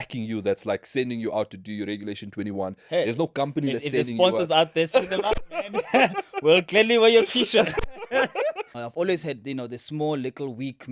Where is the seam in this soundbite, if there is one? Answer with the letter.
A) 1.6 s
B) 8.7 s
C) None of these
B